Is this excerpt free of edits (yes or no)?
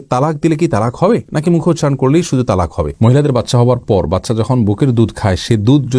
no